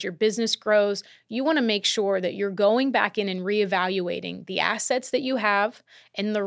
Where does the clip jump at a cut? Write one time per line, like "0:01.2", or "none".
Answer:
none

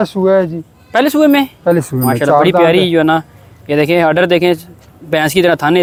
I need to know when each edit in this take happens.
none

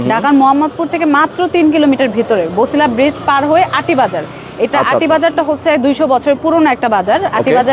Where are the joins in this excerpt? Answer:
none

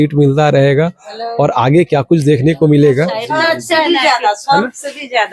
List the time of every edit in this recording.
0:03.2

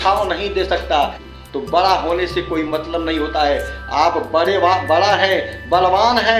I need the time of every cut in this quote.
0:01.3

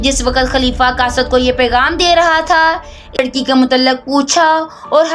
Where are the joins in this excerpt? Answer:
0:03.2

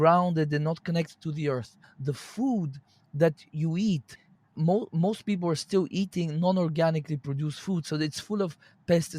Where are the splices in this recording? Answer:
0:01.9
0:04.6

